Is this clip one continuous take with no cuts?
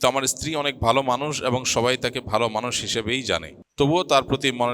no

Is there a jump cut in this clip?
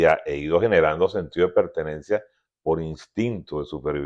no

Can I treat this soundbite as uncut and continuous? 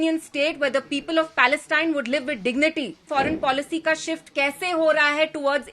no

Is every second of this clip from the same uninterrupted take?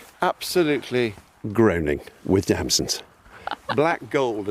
yes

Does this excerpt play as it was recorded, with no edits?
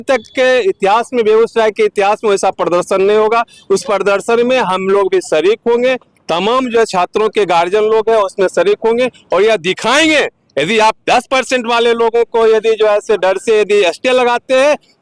yes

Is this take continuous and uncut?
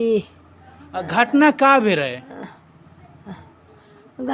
yes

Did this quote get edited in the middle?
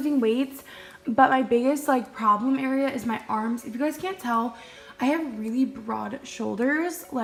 no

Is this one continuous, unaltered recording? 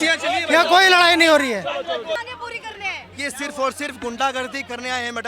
no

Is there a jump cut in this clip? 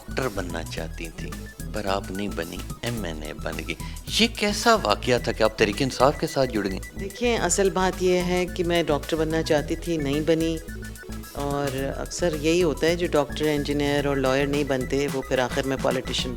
no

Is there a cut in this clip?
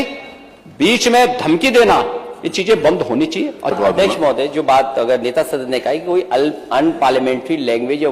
yes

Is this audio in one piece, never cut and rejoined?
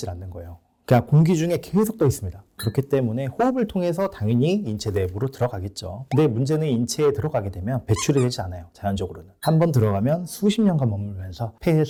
yes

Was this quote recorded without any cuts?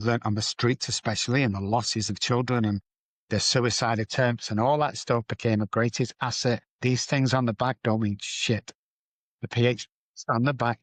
yes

